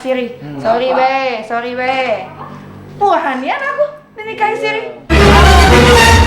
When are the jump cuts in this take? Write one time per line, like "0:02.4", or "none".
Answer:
0:05.0